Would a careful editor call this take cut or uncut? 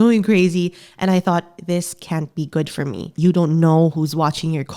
cut